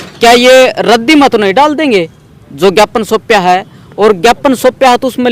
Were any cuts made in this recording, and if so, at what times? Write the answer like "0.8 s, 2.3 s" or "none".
none

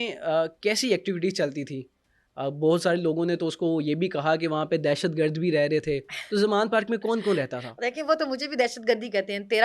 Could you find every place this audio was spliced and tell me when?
none

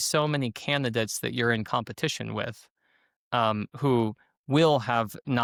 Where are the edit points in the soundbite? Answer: none

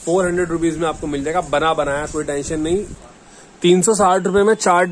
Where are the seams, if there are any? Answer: 3.0 s

